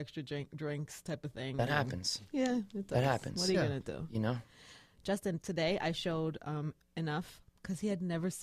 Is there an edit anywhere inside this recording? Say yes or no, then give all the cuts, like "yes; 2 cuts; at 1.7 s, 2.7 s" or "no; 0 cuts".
no; 0 cuts